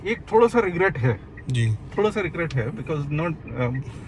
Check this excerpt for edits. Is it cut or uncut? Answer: uncut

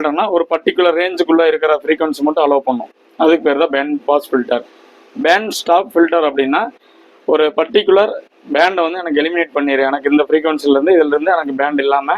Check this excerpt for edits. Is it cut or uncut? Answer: uncut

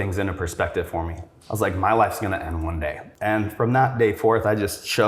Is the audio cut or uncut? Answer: cut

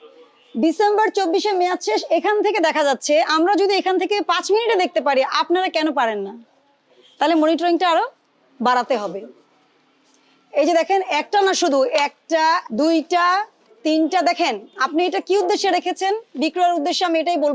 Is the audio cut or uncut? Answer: uncut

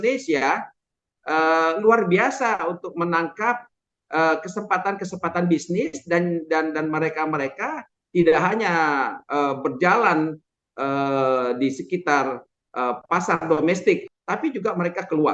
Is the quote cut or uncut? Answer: cut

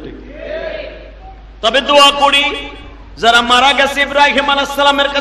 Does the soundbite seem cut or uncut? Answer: uncut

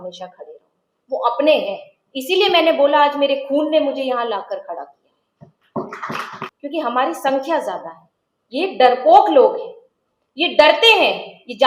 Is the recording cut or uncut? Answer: cut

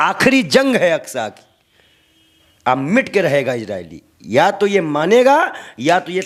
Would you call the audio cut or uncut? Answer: uncut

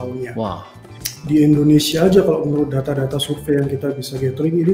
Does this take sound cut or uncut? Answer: cut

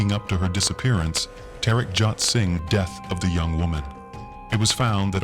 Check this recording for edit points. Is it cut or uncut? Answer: cut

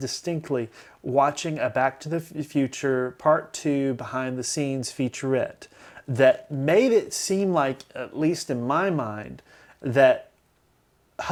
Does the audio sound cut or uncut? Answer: uncut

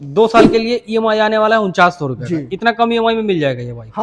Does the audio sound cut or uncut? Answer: uncut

